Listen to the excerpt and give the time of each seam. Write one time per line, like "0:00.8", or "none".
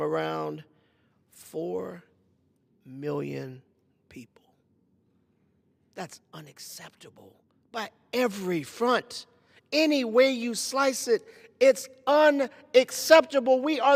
none